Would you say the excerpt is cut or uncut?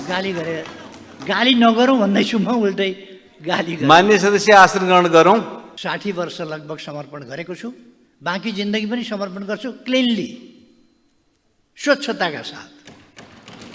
cut